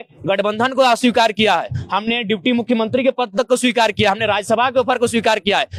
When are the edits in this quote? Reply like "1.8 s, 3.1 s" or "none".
none